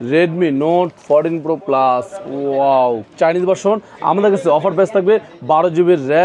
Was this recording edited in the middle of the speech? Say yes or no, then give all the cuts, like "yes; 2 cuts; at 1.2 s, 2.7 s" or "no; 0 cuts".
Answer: no; 0 cuts